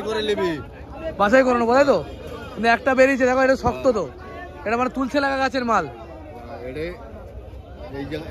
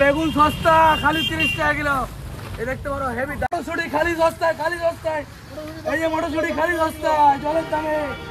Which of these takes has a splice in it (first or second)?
second